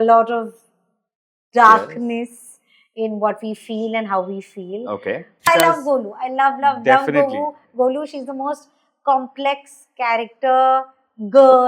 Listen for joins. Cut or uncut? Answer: cut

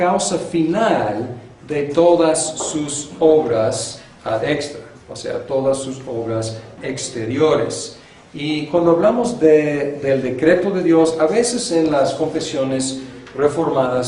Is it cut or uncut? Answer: cut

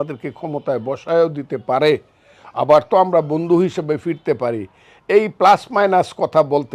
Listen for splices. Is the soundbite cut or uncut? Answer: uncut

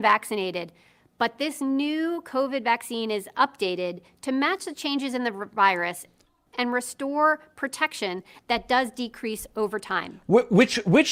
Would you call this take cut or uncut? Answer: uncut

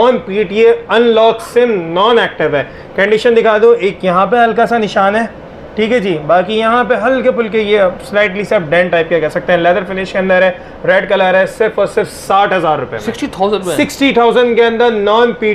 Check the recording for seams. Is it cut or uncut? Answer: uncut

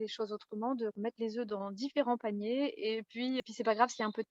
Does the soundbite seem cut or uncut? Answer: cut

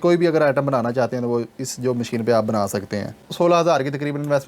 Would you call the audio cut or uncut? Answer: cut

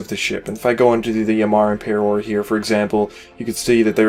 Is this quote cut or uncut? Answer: uncut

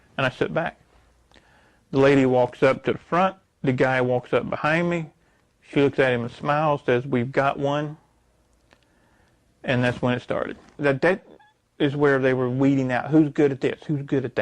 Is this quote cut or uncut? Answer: cut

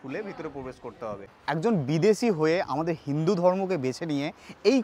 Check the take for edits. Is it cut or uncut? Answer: cut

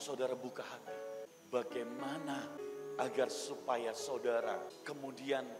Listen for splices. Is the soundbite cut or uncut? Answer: cut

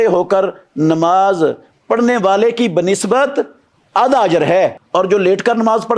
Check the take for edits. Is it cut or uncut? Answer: cut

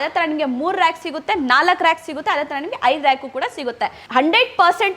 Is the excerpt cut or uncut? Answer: cut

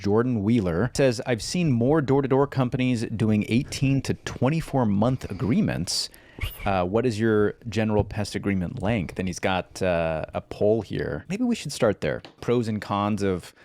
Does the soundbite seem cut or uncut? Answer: cut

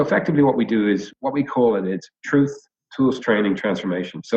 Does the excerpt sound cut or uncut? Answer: cut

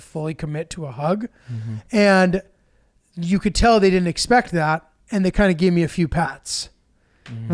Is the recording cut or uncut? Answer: uncut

